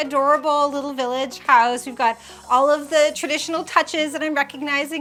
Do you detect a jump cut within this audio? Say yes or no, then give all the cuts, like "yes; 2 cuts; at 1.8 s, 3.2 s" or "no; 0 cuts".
no; 0 cuts